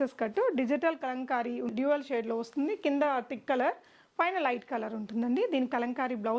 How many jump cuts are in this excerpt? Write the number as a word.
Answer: one